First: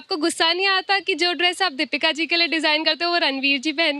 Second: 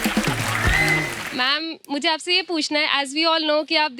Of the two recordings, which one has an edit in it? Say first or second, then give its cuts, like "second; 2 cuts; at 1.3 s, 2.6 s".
second; 1 cut; at 1.2 s